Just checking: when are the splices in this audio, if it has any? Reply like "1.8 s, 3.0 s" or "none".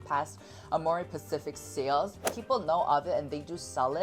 2.2 s